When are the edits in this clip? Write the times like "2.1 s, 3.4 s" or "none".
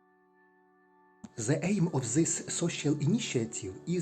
1.2 s